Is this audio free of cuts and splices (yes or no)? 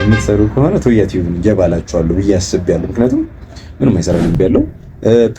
no